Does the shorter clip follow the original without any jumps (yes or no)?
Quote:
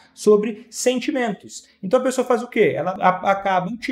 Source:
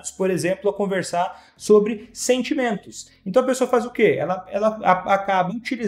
no